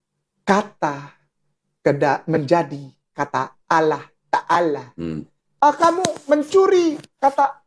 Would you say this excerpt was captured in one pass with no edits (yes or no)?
no